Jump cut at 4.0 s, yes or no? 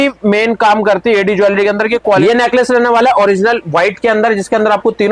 no